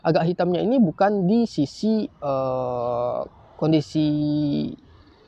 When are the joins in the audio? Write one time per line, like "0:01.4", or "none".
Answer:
none